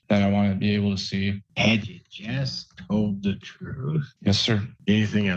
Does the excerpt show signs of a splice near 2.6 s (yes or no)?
no